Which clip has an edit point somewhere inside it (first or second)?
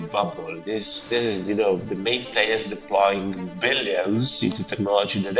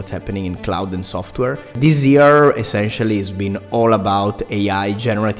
second